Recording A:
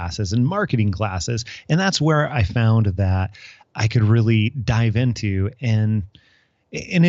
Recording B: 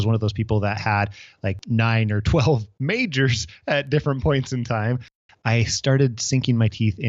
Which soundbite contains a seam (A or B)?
B